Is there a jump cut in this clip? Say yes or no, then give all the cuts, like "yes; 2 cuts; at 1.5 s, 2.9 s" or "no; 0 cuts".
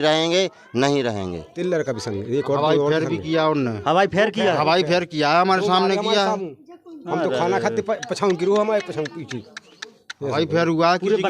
yes; 1 cut; at 1.5 s